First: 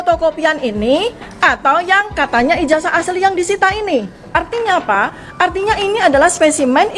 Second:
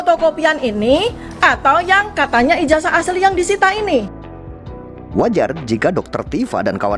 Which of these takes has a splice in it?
first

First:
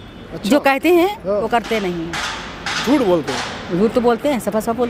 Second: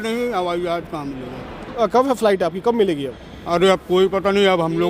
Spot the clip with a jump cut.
second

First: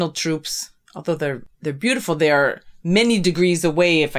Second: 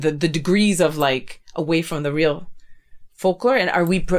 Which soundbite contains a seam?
first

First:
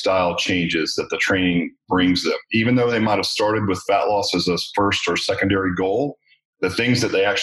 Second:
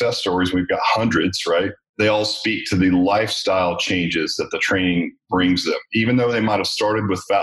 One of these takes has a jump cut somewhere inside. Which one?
second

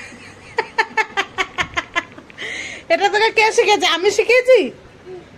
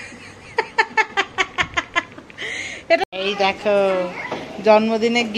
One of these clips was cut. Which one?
second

